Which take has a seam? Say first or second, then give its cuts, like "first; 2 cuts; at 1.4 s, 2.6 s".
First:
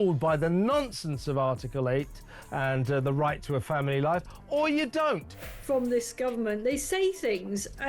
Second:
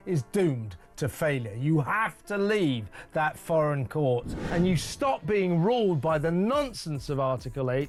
first; 1 cut; at 5.3 s